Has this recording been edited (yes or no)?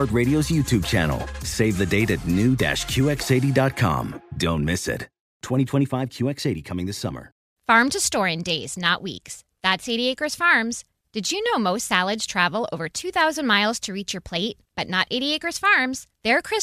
yes